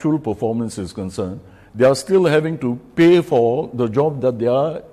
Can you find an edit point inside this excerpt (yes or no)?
no